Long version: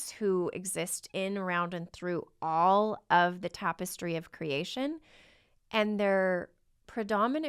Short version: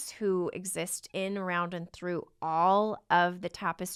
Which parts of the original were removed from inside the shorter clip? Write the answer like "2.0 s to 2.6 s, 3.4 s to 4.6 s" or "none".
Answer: none

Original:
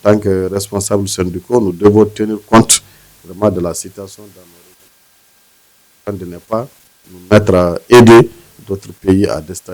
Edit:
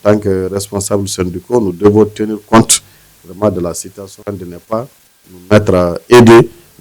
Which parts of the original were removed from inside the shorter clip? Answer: 4.1 s to 5.9 s

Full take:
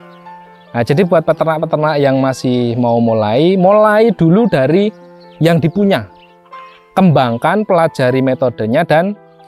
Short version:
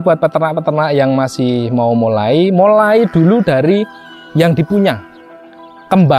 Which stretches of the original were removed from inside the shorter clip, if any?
none

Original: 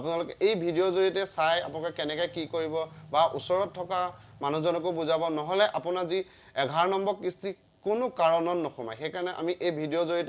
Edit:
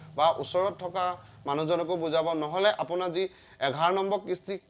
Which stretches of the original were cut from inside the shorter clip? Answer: none

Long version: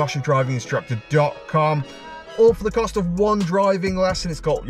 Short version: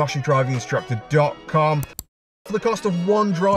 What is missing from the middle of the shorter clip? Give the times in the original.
2.4 s to 2.5 s

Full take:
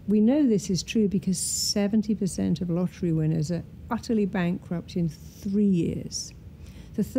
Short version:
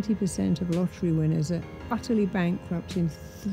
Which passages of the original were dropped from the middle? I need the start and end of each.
none

